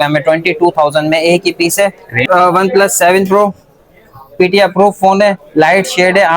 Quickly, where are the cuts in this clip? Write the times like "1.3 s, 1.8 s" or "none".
2.2 s